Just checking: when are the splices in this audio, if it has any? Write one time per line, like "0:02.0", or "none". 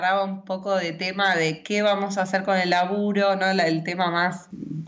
none